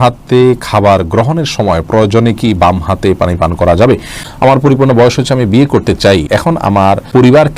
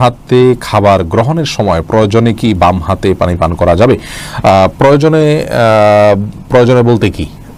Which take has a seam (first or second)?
first